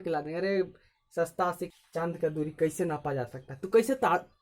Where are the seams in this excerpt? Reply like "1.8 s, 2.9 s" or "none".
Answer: 1.7 s